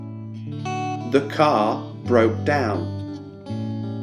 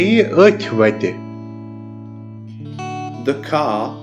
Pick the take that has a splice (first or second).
first